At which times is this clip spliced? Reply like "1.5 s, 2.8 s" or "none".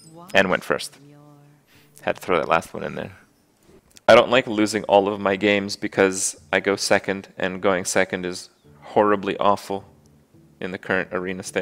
6.3 s